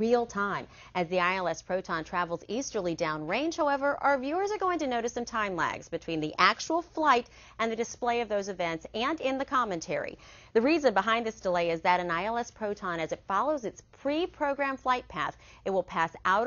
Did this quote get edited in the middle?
yes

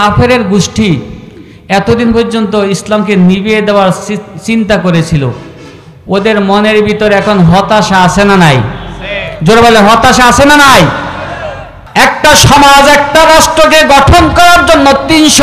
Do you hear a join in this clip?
yes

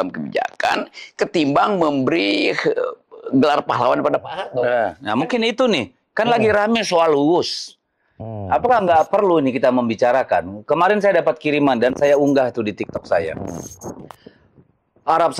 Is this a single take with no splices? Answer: yes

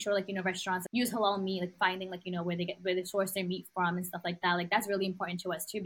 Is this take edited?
yes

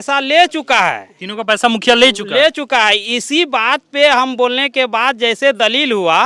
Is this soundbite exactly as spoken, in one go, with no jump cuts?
yes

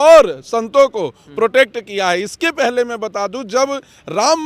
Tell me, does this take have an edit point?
no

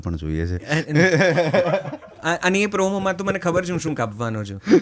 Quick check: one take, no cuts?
yes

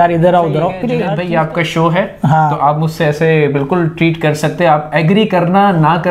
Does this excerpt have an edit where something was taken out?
yes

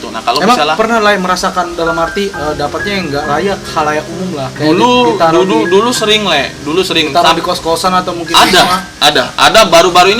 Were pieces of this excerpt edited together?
yes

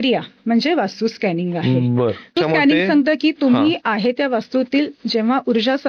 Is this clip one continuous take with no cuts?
no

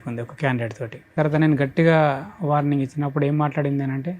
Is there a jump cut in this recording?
yes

